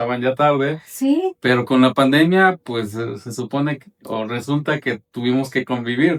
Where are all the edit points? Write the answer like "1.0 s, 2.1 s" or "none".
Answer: none